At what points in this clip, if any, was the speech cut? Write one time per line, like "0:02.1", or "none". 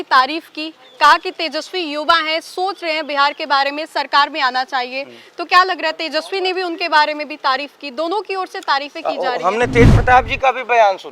none